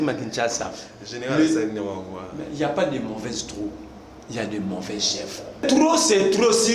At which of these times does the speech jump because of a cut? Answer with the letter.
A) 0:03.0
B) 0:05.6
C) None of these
B